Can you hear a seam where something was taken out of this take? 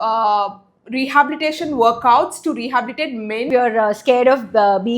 yes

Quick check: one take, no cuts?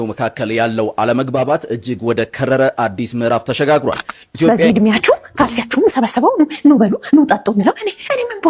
no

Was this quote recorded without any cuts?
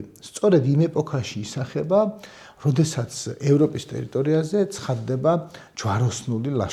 yes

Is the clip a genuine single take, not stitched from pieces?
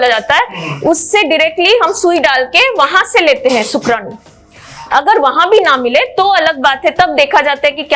yes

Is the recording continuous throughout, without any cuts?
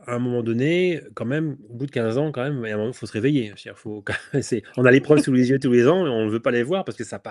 yes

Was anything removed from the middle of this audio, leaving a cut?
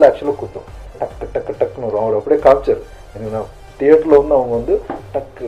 yes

